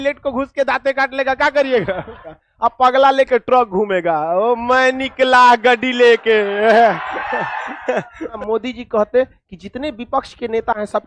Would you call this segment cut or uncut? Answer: cut